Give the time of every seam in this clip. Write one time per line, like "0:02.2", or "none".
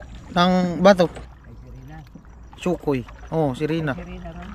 0:01.3